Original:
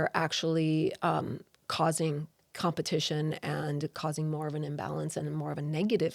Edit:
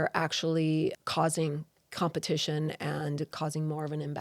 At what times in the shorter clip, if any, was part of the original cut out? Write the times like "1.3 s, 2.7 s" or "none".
1.0 s